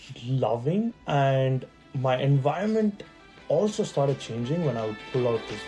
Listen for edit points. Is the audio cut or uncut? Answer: cut